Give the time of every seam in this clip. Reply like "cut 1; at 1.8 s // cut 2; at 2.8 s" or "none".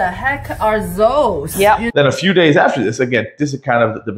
cut 1; at 1.7 s